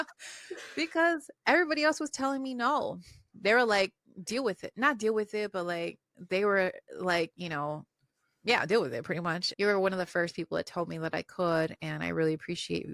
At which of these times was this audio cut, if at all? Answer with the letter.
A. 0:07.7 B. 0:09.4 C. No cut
B